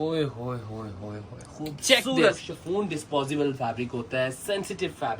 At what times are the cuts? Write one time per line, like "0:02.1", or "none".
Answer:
0:02.4